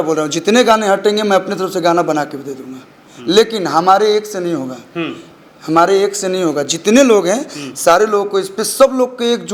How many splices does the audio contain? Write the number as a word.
zero